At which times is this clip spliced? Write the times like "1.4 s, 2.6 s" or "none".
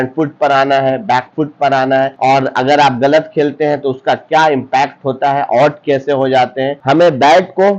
2.1 s, 6.8 s

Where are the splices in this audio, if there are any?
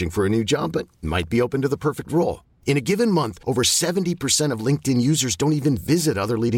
none

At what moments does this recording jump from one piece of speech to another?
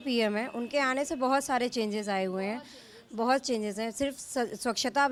none

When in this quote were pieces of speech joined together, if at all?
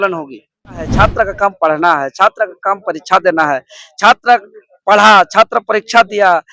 0.9 s

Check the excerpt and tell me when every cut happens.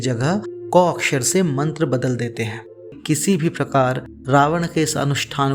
2.9 s

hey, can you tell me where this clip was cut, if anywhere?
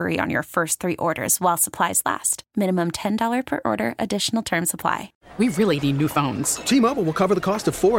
5.2 s

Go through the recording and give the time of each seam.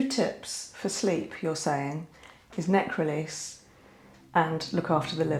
none

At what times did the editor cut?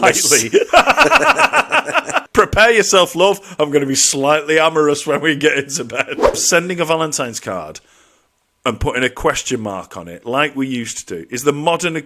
2.2 s, 6.4 s

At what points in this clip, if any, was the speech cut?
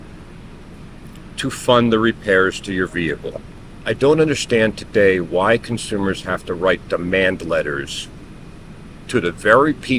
3.5 s

